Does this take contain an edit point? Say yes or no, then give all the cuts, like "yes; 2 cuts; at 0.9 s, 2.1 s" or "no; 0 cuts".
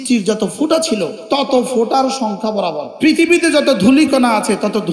yes; 2 cuts; at 1.2 s, 2.8 s